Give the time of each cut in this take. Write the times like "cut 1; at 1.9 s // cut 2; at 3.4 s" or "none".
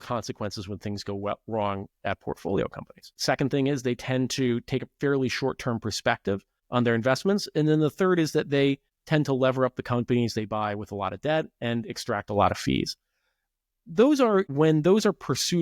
cut 1; at 6.5 s // cut 2; at 8.9 s